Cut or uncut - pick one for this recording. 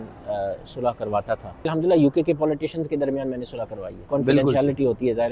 cut